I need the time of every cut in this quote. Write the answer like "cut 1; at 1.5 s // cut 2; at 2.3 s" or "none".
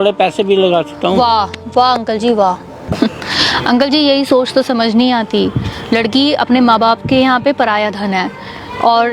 cut 1; at 2.9 s